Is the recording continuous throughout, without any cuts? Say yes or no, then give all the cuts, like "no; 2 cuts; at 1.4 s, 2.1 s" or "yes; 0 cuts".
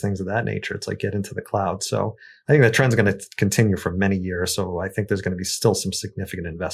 yes; 0 cuts